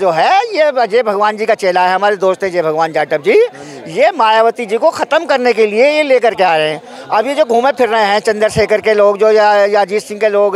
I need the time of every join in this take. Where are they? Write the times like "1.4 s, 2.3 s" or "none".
none